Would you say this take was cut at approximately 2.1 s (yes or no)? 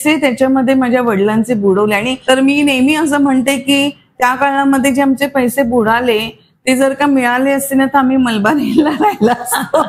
yes